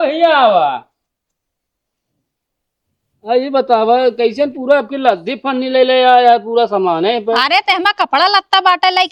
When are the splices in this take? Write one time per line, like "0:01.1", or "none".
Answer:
none